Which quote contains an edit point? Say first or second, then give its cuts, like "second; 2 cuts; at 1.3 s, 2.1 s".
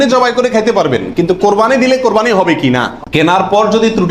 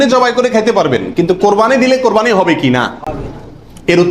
first; 1 cut; at 3.0 s